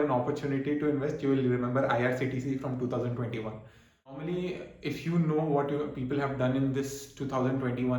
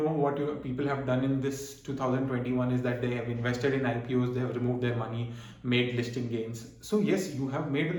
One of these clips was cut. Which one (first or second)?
first